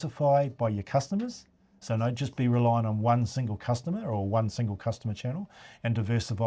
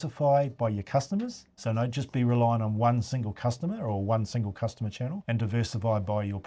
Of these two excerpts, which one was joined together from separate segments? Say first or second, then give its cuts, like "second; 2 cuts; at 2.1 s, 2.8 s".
second; 2 cuts; at 1.5 s, 5.2 s